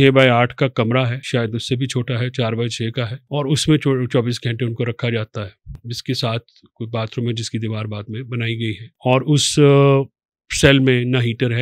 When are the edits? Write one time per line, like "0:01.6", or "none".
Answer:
0:01.2
0:03.2
0:08.9